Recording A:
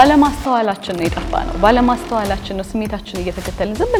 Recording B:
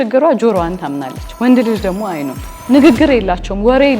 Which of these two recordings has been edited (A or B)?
B